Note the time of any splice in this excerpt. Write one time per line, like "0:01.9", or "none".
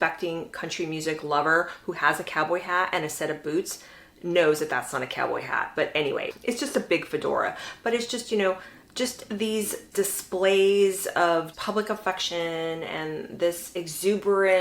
0:09.9
0:11.5